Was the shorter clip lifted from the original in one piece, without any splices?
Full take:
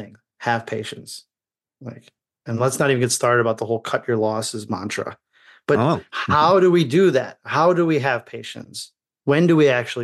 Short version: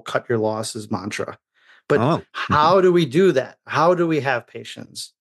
yes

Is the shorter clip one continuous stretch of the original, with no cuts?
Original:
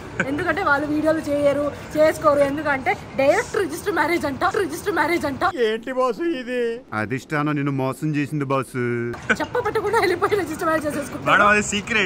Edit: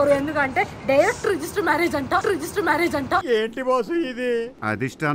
yes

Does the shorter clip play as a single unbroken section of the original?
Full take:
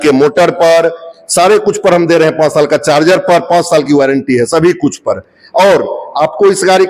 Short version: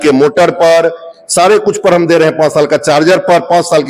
yes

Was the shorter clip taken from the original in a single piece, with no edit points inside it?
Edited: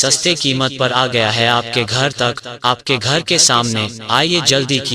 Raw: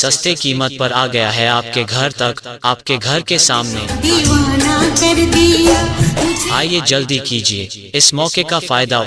no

